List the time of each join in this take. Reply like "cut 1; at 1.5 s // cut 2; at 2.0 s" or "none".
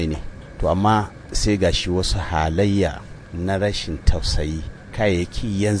none